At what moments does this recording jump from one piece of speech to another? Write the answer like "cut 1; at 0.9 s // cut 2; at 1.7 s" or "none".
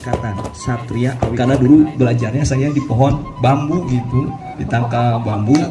cut 1; at 1.3 s